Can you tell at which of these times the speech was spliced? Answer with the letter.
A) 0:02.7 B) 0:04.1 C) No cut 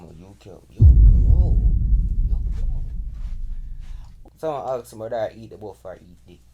B